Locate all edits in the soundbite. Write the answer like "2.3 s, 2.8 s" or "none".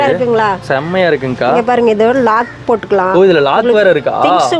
none